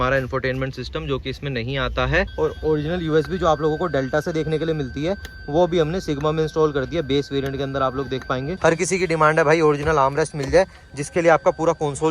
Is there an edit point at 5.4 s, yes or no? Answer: no